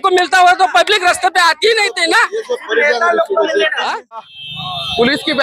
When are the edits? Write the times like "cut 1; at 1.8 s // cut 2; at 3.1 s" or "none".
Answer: cut 1; at 4.3 s